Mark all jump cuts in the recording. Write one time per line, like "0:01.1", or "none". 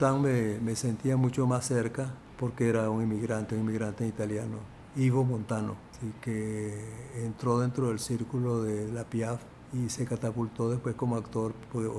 none

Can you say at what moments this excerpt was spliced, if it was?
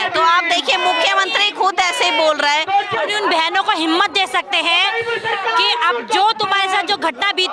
0:03.0

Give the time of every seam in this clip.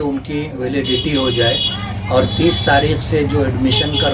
none

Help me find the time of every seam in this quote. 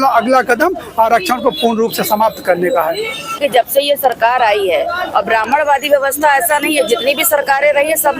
0:03.4

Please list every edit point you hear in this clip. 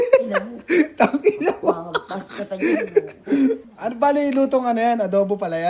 0:03.6

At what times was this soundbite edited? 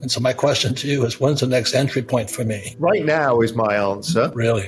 0:02.6

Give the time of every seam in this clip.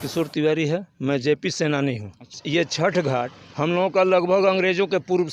0:02.3

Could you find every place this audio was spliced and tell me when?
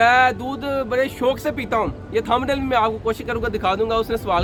none

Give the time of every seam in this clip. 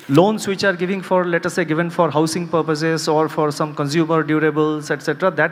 none

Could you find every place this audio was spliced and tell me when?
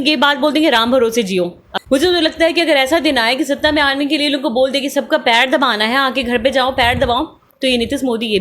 0:01.6

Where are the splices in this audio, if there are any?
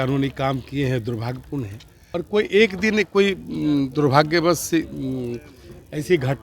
0:01.9

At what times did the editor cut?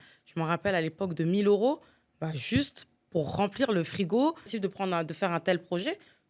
0:04.5

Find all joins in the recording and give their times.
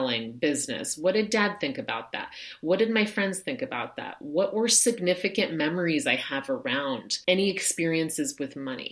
0:07.1

